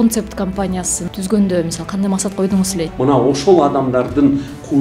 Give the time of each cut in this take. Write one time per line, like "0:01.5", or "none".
0:01.0
0:02.9